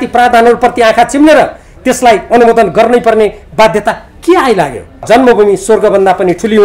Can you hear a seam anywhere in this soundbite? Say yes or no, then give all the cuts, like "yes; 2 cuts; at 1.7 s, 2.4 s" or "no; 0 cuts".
yes; 1 cut; at 5.0 s